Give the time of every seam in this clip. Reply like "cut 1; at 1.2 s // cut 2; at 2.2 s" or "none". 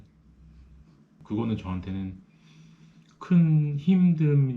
cut 1; at 1.1 s